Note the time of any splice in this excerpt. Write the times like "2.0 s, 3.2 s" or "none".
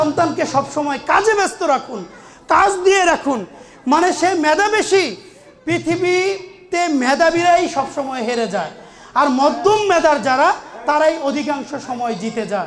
none

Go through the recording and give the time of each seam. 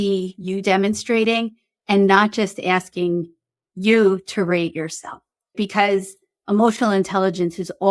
5.5 s

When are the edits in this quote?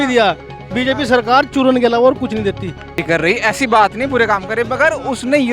3.0 s

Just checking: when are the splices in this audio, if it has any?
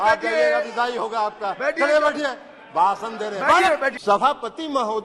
4.0 s

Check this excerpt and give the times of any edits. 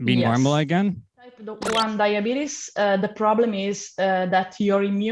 1.5 s

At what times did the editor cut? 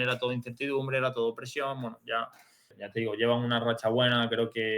2.8 s

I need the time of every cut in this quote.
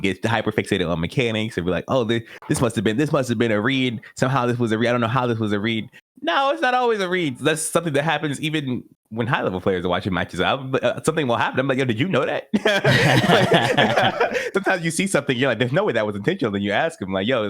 7.4 s, 14.5 s

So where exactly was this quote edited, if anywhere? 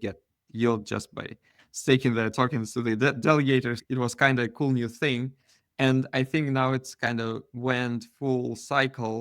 3.8 s

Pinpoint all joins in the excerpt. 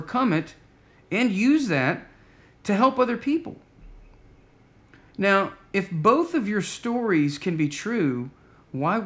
none

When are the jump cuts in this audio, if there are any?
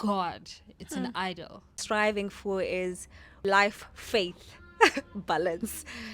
1.8 s, 3.4 s

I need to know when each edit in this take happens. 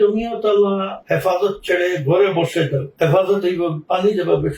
0.9 s, 2.9 s

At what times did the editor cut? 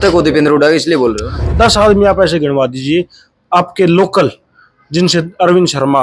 1.4 s

